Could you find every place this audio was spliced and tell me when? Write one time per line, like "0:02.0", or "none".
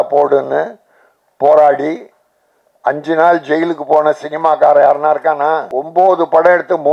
0:05.7